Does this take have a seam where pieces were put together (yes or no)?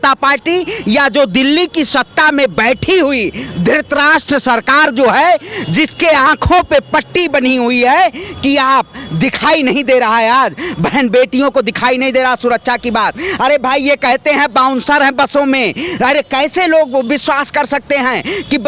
no